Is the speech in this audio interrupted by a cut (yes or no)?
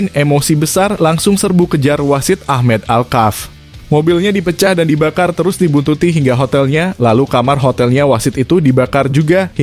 no